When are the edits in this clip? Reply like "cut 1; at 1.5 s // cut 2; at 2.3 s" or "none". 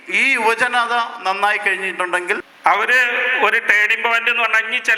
cut 1; at 2.5 s